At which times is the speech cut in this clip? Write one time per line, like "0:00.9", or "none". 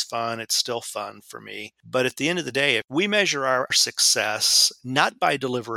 0:01.7
0:03.7